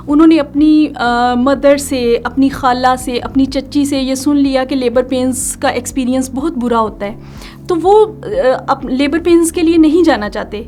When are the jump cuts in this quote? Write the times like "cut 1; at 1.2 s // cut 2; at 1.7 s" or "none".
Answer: none